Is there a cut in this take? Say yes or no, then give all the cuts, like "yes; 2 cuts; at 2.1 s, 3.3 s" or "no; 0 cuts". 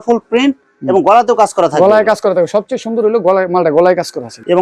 no; 0 cuts